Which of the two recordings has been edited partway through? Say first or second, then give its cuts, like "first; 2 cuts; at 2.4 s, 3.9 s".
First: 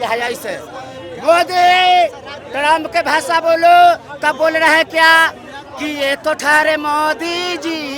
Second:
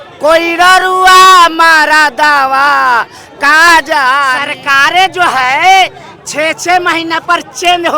second; 1 cut; at 4.5 s